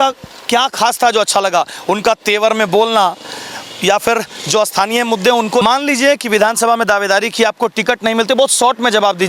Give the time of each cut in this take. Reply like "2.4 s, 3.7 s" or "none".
5.6 s